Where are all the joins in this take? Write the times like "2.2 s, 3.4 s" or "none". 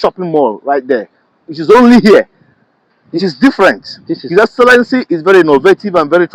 none